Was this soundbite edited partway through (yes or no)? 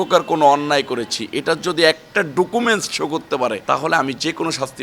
yes